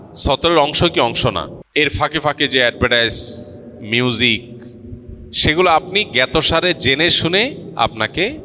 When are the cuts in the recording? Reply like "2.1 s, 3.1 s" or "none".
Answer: 1.6 s